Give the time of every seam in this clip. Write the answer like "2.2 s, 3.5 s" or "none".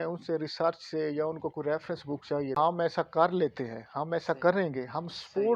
2.5 s